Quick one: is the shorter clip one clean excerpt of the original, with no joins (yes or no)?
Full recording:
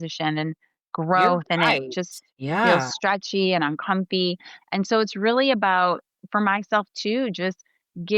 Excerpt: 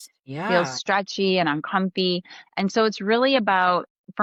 yes